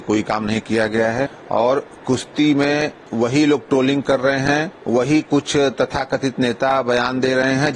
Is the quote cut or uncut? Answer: cut